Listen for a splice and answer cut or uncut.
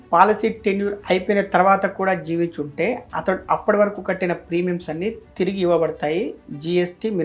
uncut